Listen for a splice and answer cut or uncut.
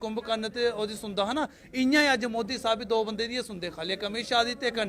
uncut